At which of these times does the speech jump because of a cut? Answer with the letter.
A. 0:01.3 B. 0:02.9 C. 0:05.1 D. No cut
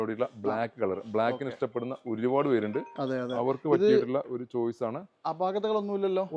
D